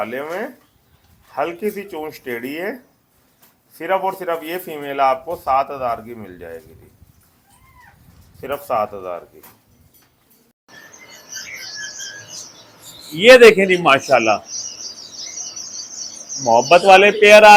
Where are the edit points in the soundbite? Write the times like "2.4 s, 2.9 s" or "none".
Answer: none

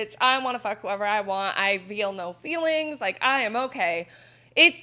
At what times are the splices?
none

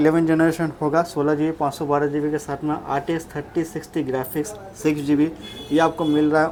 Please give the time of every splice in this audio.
none

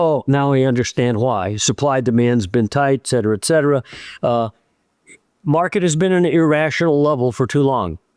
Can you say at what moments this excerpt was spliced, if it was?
none

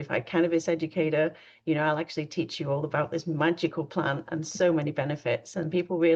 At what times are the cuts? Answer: none

